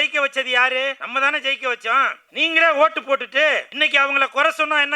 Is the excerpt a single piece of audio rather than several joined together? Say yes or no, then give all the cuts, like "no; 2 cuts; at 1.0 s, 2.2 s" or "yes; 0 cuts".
no; 3 cuts; at 1.0 s, 2.2 s, 3.7 s